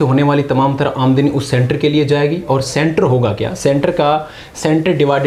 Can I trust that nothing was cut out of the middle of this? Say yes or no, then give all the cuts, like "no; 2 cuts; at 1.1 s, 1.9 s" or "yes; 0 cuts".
yes; 0 cuts